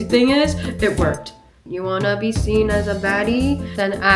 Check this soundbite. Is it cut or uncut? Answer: cut